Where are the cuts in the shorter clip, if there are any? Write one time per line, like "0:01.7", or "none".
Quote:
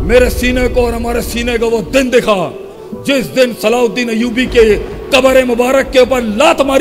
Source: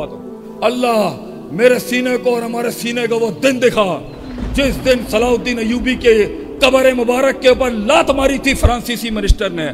none